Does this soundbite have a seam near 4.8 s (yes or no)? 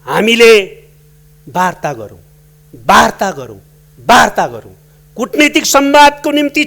no